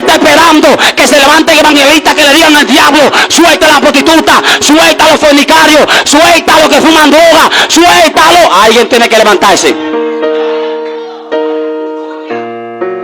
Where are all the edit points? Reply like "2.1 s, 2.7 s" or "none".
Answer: none

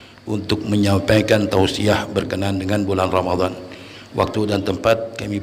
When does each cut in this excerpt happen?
none

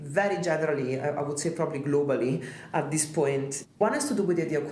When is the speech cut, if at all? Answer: 3.7 s

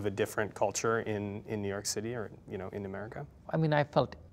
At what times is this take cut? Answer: 3.4 s

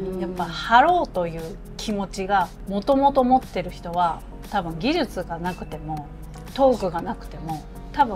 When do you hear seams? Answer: 2.6 s

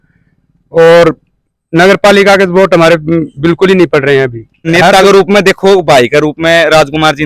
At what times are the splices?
4.7 s

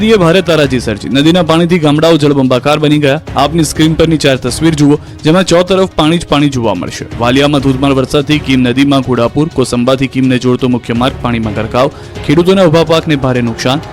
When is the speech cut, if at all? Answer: 12.9 s

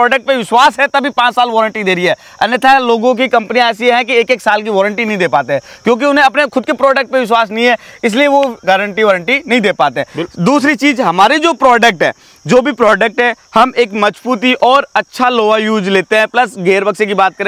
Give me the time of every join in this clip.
none

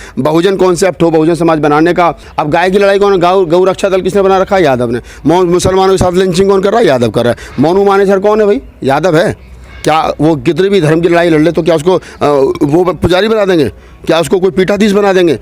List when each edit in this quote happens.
2.3 s

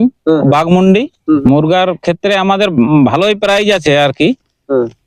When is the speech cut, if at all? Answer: 1.4 s

